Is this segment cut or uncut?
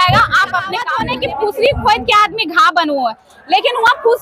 cut